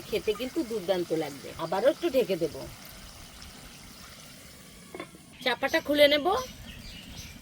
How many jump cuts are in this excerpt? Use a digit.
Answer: 2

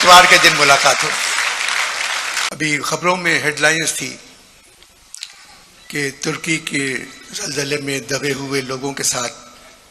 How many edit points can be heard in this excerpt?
1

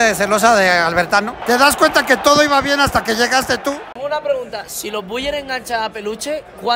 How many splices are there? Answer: 2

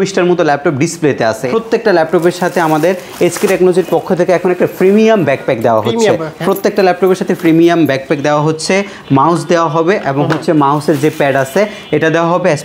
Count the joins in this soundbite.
1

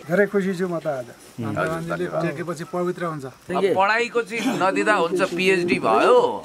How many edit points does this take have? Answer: 1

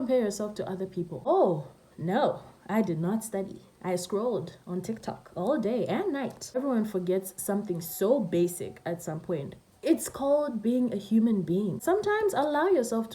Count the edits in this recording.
3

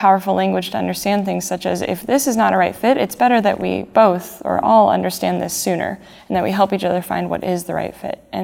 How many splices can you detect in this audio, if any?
0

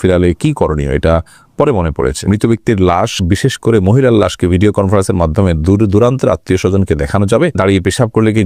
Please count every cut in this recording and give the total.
2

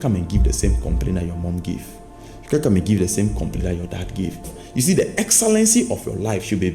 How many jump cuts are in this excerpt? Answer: 1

